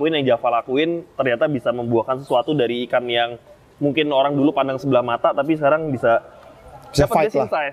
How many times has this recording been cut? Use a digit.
0